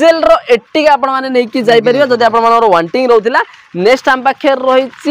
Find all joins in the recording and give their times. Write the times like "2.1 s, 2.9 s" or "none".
none